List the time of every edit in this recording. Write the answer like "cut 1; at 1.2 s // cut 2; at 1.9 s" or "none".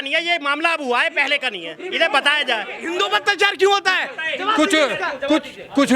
cut 1; at 2.8 s